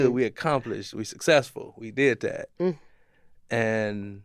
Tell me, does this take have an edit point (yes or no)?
no